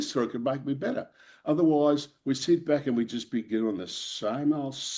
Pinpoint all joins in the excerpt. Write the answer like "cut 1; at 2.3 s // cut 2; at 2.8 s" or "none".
none